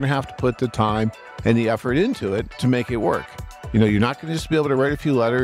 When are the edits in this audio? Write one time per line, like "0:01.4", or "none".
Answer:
0:02.5
0:03.6